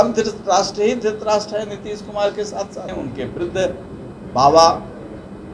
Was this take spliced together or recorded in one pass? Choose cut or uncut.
cut